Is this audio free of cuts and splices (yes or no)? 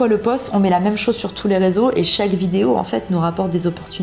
yes